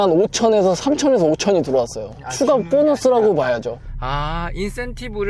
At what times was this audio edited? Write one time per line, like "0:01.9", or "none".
none